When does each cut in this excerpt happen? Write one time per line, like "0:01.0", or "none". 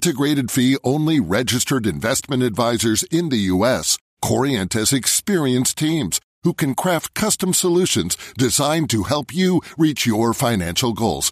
none